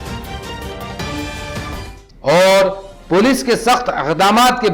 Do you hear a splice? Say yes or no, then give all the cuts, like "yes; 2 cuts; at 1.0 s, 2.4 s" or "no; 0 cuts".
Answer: no; 0 cuts